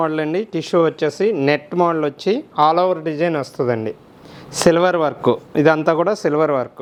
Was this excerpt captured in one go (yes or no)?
yes